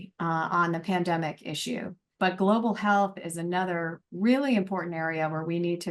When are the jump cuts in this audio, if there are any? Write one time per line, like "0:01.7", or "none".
0:02.1